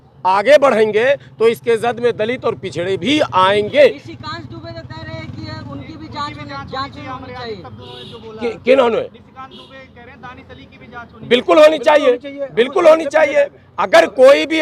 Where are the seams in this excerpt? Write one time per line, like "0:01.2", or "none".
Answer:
none

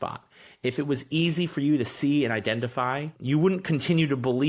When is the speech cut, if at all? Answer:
0:03.1

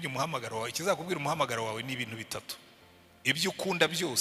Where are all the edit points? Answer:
none

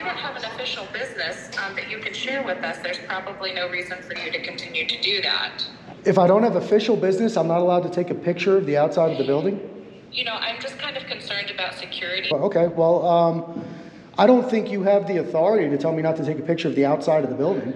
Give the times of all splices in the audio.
0:05.9
0:12.3

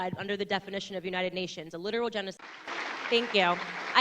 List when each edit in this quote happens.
0:02.4

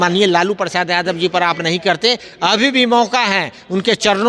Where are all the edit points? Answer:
none

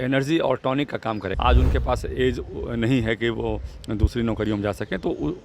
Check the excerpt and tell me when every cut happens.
0:01.3

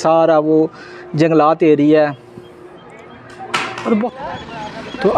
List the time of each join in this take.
0:04.0

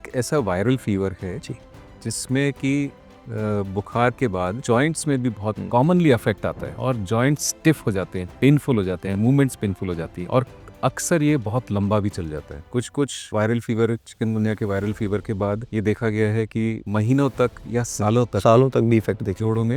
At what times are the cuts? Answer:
none

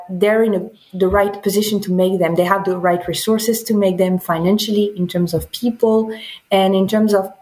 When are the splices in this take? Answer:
none

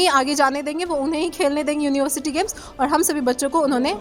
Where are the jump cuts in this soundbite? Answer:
none

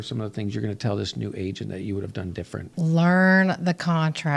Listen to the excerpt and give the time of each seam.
0:02.7

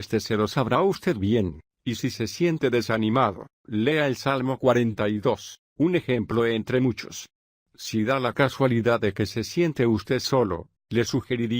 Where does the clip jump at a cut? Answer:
0:06.0

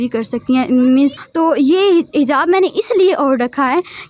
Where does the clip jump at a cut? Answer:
0:01.1

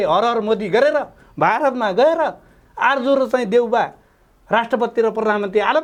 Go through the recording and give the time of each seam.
none

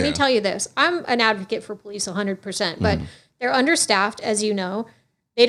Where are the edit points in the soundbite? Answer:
none

